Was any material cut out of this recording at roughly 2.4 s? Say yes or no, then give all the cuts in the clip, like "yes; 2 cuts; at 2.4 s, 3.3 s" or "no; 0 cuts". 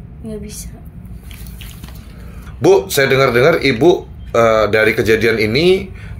yes; 1 cut; at 2.4 s